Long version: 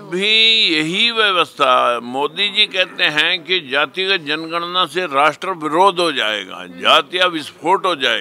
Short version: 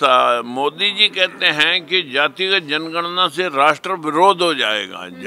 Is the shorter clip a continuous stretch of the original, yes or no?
yes